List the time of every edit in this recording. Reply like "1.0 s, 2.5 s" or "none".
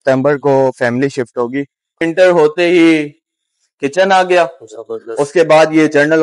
2.0 s